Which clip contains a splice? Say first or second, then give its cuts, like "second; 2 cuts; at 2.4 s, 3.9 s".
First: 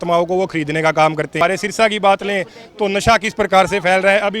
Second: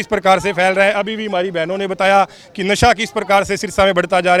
first; 1 cut; at 1.4 s